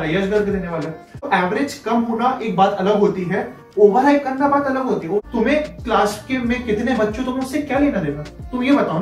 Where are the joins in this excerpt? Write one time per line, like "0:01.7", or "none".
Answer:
0:01.3
0:05.2

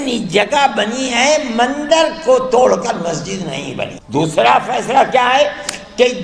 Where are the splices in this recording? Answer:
0:03.9

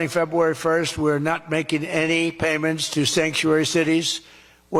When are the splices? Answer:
none

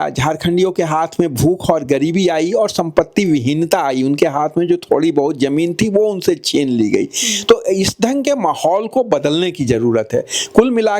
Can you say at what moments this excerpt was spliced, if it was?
none

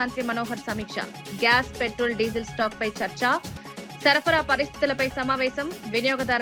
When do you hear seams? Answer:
none

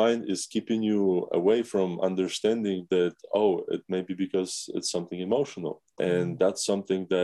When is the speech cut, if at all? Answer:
0:05.8

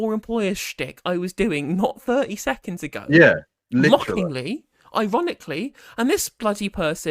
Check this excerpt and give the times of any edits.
none

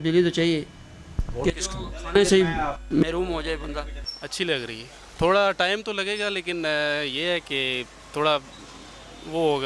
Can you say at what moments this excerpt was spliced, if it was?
none

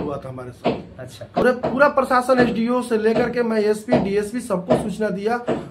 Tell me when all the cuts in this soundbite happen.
0:01.4

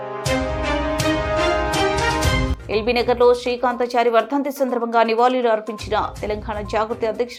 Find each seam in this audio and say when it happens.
none

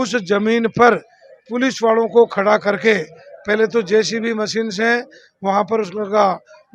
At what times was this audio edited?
none

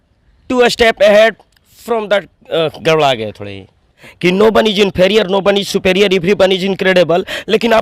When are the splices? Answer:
0:04.0

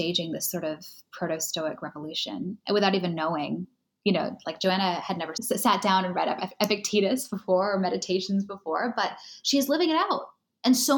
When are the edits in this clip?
none

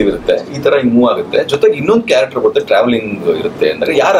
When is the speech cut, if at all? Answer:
none

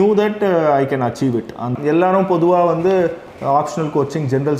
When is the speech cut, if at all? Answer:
0:01.7

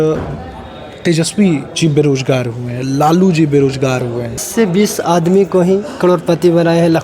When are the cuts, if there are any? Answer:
0:04.5

